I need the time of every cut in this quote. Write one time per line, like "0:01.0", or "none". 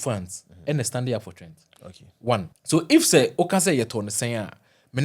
0:02.5